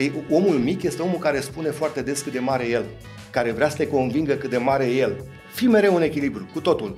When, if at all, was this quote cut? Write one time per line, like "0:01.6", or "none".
0:05.3

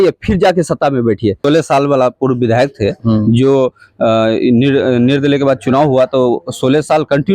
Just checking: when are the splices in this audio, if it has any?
0:01.4

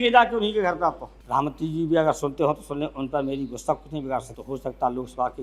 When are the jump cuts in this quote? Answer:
0:01.1
0:04.4

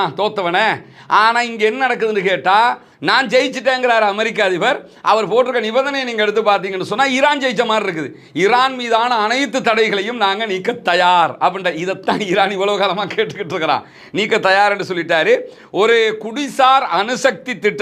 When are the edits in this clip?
none

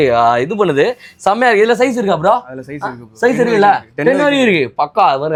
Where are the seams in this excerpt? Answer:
none

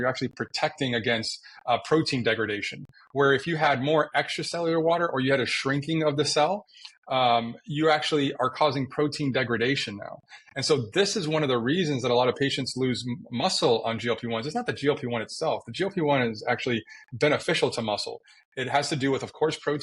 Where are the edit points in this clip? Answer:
none

